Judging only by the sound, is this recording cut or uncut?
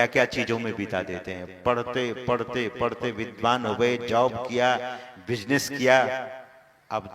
uncut